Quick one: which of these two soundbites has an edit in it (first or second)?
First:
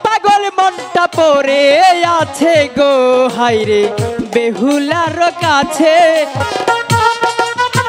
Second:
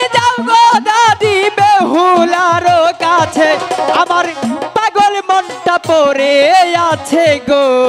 first